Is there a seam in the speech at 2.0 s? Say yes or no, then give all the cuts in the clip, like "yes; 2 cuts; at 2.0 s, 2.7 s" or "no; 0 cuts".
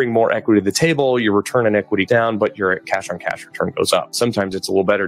yes; 2 cuts; at 2.0 s, 4.1 s